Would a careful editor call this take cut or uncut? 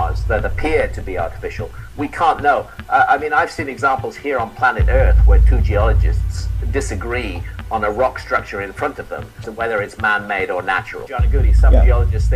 uncut